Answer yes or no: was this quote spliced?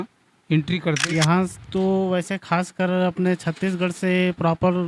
yes